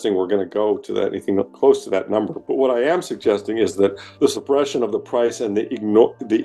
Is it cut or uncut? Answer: cut